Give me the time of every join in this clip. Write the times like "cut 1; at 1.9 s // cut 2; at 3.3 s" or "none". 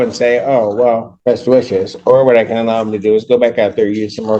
cut 1; at 1.1 s